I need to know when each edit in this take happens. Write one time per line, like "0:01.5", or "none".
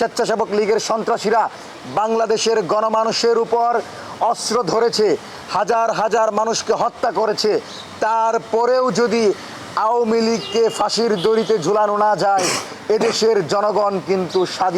none